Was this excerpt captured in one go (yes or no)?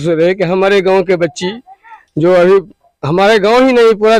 yes